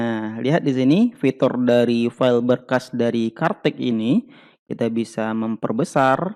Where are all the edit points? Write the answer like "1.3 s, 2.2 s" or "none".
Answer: none